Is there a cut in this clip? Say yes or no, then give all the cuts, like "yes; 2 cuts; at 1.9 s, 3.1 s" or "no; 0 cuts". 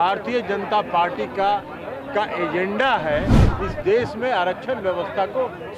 no; 0 cuts